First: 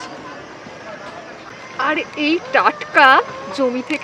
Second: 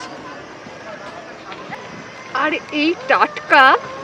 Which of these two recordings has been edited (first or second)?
first